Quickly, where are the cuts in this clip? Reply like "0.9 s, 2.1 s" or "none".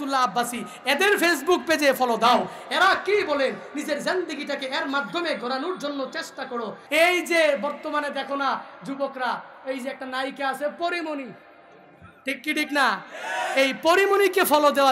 6.8 s